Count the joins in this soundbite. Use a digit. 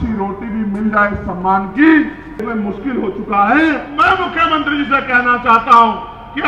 2